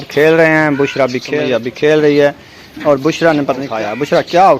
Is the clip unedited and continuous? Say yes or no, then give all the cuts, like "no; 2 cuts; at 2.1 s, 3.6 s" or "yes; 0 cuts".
no; 2 cuts; at 1.3 s, 3.7 s